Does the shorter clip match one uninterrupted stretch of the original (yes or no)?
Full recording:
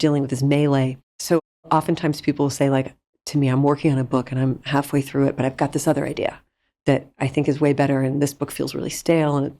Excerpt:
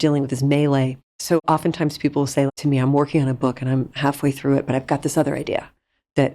no